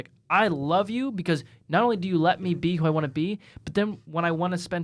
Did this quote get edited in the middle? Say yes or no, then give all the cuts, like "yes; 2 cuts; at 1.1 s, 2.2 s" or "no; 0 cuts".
no; 0 cuts